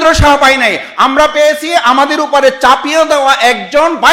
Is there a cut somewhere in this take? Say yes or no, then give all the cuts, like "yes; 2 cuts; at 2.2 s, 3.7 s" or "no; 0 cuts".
no; 0 cuts